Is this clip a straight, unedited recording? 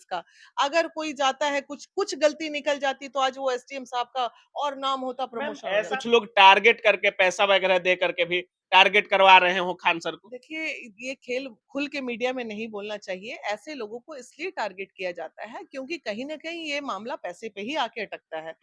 no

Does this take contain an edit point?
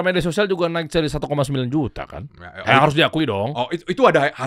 no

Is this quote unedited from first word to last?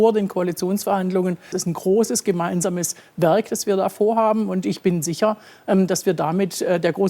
no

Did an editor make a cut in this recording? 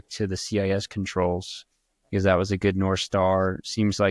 no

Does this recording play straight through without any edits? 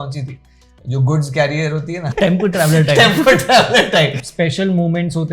no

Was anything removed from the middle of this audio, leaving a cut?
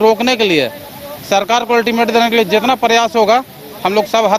no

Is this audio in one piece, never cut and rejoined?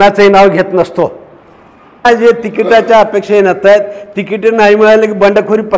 no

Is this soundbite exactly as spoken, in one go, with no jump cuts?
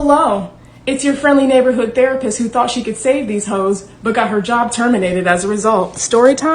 yes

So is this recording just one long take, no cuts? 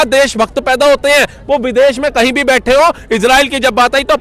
yes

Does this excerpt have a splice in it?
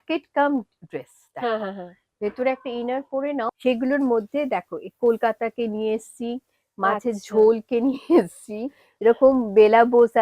yes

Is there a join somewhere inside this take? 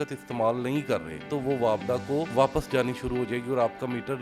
yes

